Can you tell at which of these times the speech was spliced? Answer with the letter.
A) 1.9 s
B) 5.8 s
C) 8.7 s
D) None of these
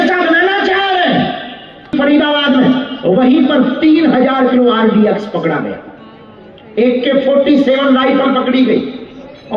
A